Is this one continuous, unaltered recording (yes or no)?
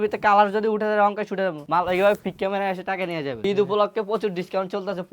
no